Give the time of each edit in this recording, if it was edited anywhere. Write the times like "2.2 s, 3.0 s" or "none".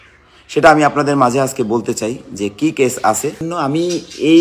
3.4 s